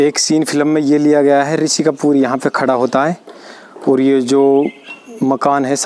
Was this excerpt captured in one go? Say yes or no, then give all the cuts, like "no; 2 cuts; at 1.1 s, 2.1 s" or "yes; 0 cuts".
yes; 0 cuts